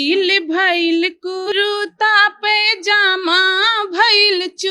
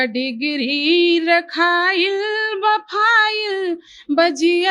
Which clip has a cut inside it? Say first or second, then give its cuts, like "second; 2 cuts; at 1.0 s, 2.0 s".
first; 1 cut; at 1.5 s